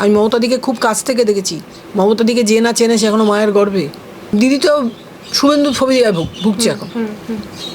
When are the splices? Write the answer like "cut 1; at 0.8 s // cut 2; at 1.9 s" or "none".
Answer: cut 1; at 4.3 s